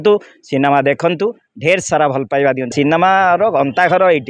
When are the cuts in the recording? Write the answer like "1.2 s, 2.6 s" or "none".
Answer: 2.7 s

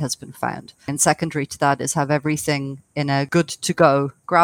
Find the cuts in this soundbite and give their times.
0.9 s, 3.3 s

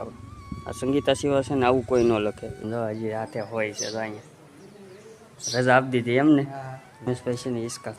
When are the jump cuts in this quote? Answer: 2.5 s, 7.1 s

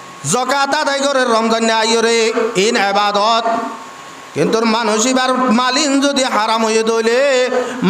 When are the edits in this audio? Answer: none

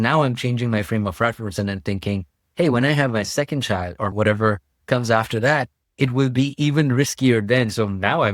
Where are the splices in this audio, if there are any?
4.1 s

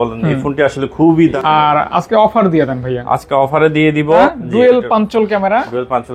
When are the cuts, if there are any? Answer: 1.3 s, 4.3 s

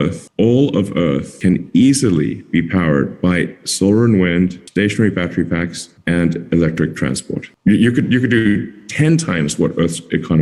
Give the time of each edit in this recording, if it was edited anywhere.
7.5 s

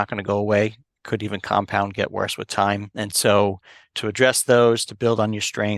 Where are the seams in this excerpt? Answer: 2.9 s, 3.9 s

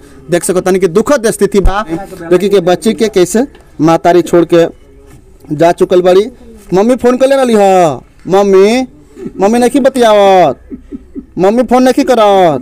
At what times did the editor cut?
none

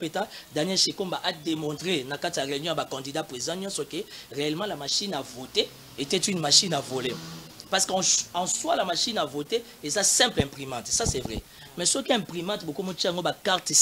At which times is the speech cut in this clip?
none

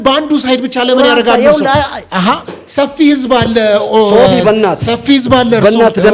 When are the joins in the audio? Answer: none

